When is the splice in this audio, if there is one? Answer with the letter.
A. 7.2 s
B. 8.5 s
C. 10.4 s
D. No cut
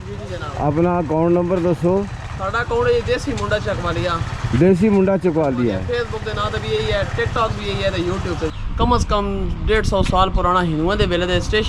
B